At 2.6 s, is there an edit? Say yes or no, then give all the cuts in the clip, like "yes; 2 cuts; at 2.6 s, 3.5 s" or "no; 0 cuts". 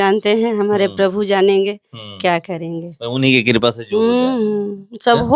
no; 0 cuts